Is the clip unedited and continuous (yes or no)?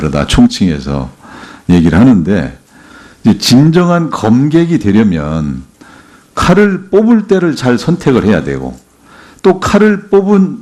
no